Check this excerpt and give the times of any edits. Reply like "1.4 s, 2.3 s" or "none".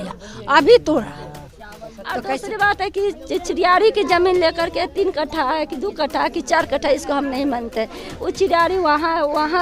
2.3 s